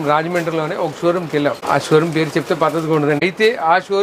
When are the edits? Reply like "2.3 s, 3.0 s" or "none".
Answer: 1.6 s, 3.2 s